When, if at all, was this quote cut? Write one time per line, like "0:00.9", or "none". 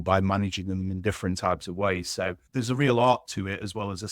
0:02.4